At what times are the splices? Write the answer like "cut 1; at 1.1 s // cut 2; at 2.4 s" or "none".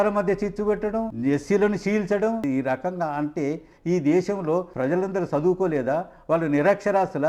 cut 1; at 1.1 s // cut 2; at 2.4 s // cut 3; at 4.7 s